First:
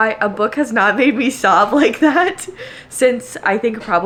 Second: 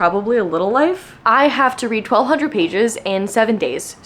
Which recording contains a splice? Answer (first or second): second